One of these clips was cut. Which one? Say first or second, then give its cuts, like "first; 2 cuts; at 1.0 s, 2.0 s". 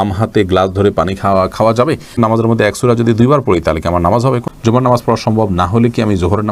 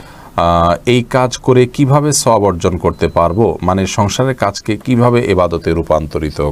first; 2 cuts; at 2.1 s, 4.4 s